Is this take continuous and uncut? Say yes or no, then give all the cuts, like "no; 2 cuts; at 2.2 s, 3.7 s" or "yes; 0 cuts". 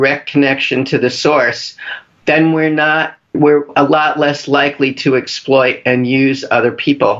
no; 1 cut; at 3.7 s